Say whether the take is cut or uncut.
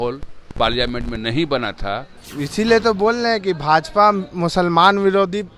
cut